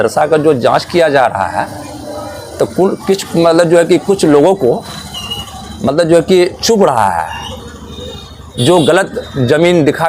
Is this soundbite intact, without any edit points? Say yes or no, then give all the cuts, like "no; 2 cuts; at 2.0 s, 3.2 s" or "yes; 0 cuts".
yes; 0 cuts